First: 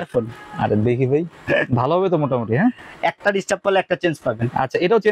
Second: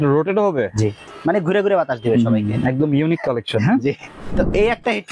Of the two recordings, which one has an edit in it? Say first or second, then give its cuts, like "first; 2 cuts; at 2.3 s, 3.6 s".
second; 2 cuts; at 1.1 s, 4.2 s